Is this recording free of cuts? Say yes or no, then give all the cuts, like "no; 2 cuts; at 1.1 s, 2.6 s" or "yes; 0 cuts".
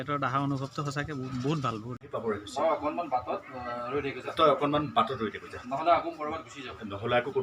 no; 1 cut; at 2.0 s